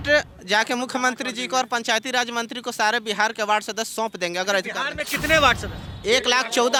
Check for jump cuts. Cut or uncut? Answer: uncut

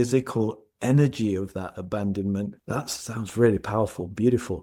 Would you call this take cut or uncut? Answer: uncut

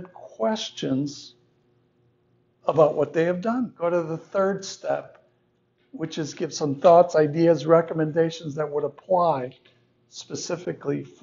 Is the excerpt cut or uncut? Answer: cut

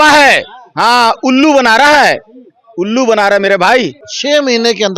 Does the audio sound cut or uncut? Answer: cut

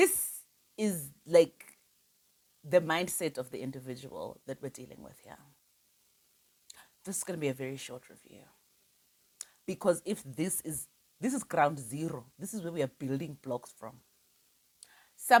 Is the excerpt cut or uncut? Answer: uncut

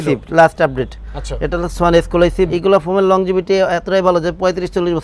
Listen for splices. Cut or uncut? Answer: cut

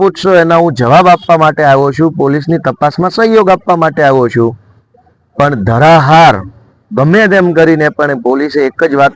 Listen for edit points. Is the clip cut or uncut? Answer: uncut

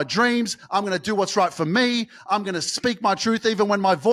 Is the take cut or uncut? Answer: uncut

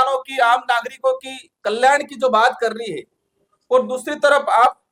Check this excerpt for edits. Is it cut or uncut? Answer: uncut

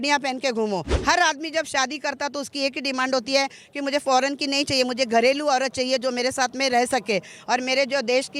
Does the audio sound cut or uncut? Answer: cut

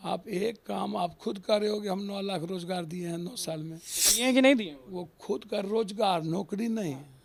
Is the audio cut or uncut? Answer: uncut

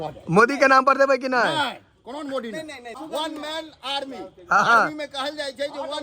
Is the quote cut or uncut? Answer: cut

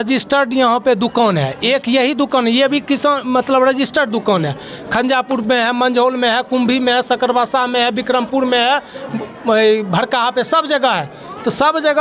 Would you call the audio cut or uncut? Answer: uncut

